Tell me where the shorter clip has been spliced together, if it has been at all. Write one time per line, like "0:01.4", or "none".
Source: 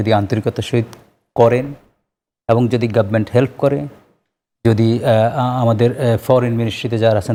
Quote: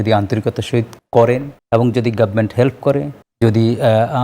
0:01.0
0:01.5
0:03.2